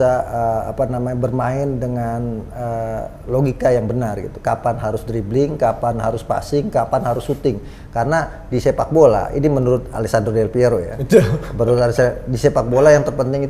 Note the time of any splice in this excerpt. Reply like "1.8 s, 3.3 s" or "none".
none